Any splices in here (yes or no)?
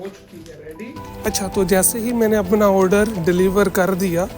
yes